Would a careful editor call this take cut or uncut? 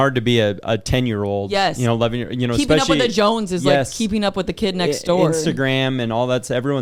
uncut